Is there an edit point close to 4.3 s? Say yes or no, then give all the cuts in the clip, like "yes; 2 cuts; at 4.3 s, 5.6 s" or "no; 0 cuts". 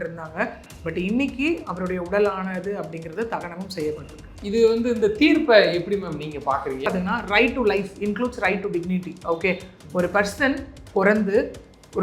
yes; 2 cuts; at 4.3 s, 6.8 s